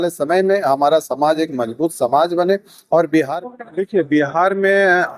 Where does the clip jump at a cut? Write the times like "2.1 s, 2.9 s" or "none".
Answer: 3.3 s

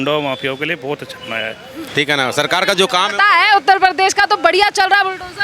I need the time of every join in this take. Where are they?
1.7 s

